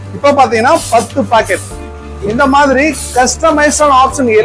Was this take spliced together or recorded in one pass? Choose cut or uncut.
uncut